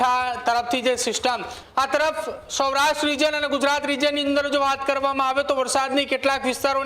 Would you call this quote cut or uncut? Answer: cut